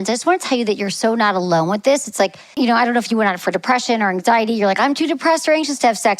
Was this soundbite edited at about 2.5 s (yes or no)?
yes